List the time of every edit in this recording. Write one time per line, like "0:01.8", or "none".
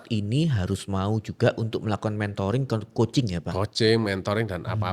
none